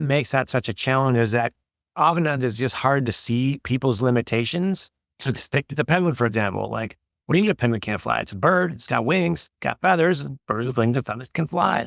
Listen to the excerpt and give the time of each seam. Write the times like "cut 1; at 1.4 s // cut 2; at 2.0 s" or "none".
cut 1; at 4.6 s